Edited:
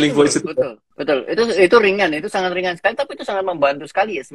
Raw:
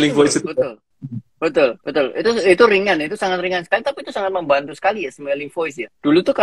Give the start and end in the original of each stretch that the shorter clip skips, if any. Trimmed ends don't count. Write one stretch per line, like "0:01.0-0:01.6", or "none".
0:00.9-0:01.8